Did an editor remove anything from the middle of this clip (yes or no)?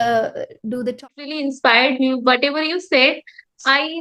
yes